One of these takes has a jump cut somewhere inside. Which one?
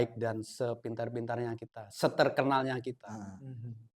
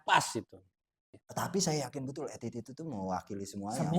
second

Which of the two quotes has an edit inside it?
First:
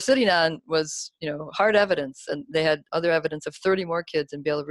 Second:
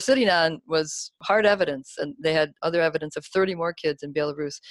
second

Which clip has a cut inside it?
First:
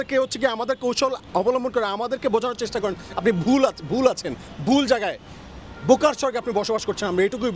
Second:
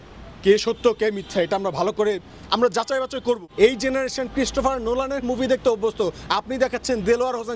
second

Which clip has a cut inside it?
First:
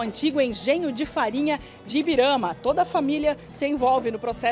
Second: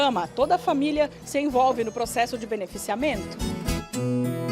second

